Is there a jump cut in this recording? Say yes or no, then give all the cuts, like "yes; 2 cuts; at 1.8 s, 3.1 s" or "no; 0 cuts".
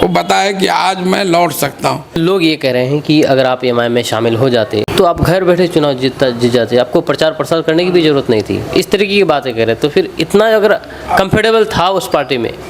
yes; 2 cuts; at 2.2 s, 4.9 s